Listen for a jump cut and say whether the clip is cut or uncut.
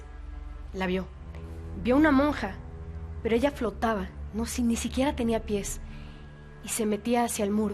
uncut